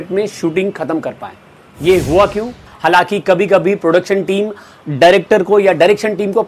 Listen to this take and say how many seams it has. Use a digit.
1